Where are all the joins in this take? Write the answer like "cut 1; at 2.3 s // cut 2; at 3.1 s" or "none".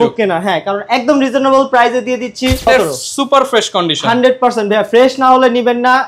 cut 1; at 2.7 s